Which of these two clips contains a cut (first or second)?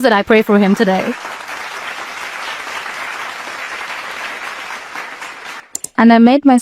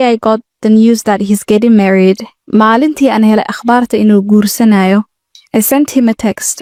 first